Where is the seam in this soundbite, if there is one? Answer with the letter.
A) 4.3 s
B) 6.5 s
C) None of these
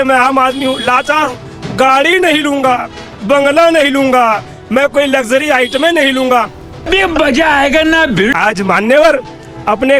C